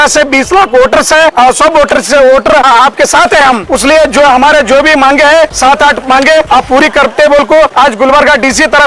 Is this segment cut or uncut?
cut